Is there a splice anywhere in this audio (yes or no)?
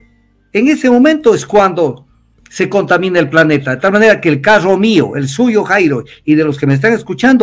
no